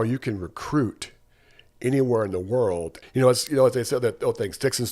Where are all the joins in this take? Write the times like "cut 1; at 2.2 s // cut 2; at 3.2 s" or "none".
cut 1; at 3.0 s